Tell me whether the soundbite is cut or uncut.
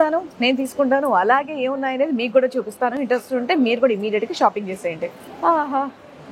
uncut